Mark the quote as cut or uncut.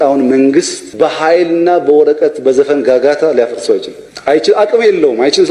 uncut